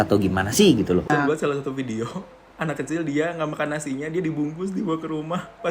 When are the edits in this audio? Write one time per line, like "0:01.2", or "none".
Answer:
0:01.3